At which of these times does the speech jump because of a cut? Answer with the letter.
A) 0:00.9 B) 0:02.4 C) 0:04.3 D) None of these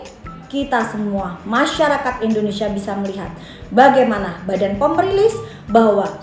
D